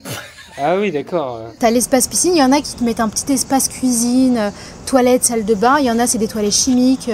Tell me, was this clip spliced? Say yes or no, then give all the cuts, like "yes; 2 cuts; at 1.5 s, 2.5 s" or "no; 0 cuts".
yes; 1 cut; at 1.5 s